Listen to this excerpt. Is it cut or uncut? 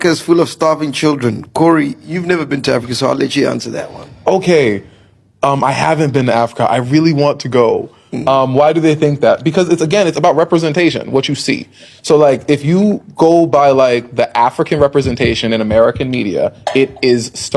uncut